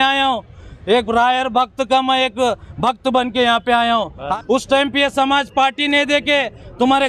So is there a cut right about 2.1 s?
no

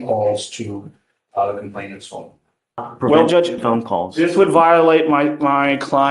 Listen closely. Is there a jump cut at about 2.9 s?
yes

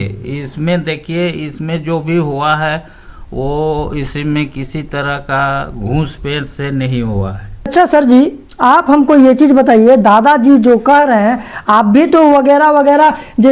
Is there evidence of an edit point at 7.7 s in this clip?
yes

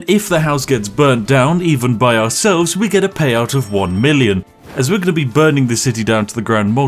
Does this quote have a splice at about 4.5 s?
yes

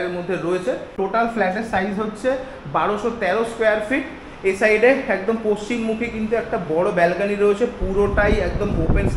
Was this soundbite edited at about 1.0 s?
yes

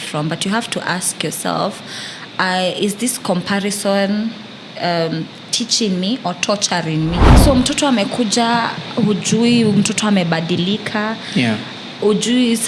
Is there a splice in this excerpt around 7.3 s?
yes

